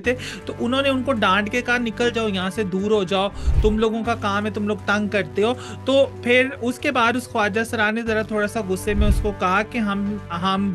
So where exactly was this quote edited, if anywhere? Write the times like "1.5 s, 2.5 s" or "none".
none